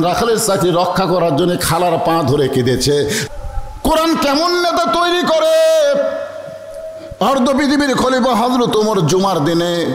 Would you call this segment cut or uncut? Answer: cut